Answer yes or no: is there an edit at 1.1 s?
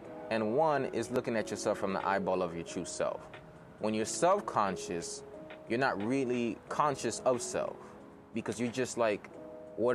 yes